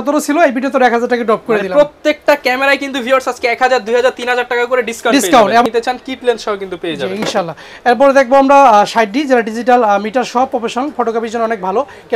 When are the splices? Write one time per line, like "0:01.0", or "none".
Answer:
0:05.6